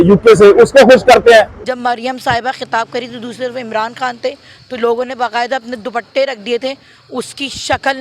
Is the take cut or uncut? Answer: cut